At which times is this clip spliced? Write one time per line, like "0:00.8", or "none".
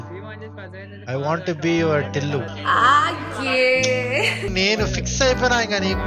0:04.5